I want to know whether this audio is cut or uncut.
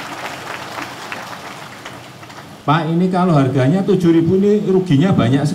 cut